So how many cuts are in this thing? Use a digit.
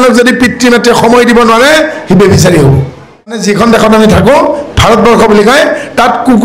1